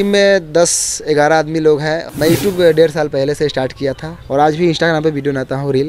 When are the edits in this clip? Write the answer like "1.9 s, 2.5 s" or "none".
2.0 s, 4.1 s